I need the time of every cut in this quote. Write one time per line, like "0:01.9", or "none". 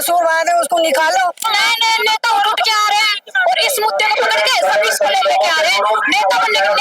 0:01.5